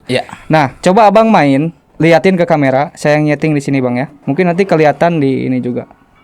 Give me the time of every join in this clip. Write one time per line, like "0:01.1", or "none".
0:01.8
0:04.1